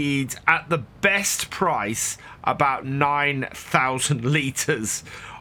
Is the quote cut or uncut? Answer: uncut